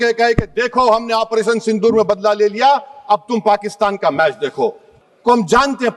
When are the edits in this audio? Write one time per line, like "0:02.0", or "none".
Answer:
0:04.9